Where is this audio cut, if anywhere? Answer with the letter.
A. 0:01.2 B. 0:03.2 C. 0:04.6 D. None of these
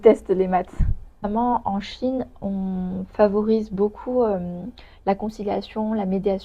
A